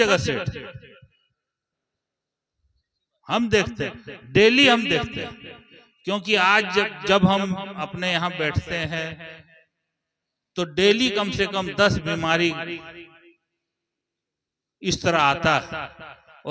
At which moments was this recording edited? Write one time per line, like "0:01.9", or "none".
none